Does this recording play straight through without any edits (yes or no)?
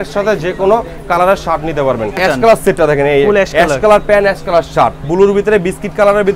no